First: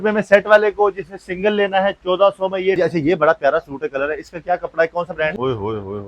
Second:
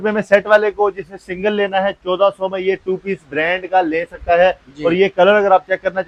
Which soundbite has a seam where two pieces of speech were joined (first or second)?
first